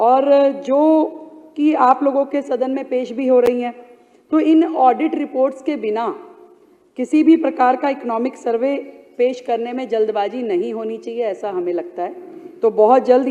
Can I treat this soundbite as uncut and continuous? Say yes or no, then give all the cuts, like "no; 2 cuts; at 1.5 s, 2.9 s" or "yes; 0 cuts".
yes; 0 cuts